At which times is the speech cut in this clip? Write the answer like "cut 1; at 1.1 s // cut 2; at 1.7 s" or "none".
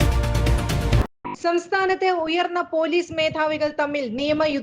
cut 1; at 1.1 s